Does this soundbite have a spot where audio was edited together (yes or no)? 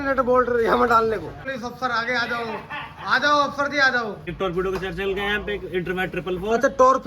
yes